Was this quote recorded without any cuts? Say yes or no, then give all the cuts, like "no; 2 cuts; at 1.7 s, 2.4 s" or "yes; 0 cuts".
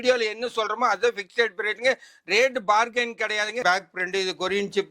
no; 1 cut; at 3.6 s